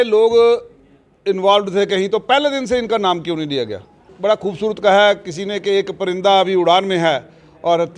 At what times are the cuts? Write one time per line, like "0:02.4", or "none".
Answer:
0:04.1